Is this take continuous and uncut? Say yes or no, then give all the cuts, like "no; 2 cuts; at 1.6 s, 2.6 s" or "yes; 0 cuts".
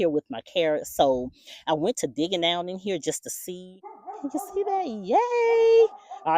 no; 1 cut; at 3.6 s